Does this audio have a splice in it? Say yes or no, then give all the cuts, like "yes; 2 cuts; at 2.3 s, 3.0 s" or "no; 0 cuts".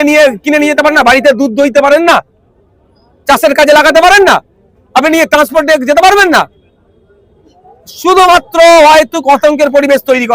no; 0 cuts